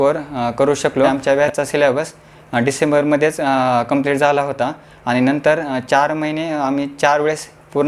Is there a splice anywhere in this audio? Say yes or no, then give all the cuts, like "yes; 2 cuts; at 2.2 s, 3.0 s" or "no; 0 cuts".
yes; 1 cut; at 1.2 s